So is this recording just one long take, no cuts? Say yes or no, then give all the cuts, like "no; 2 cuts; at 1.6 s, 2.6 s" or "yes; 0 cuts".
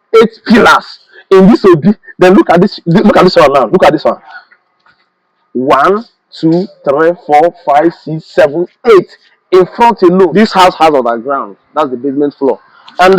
no; 1 cut; at 10.3 s